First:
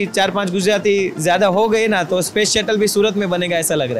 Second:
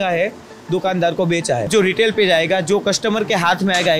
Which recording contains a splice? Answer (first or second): second